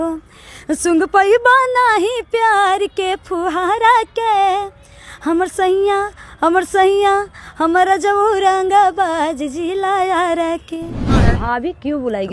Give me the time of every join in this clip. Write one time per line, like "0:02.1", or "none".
0:11.1